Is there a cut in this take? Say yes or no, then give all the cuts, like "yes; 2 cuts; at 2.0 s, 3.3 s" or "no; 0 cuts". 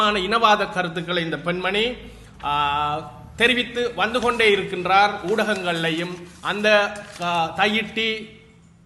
no; 0 cuts